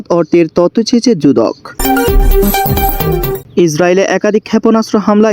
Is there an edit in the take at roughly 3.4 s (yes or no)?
yes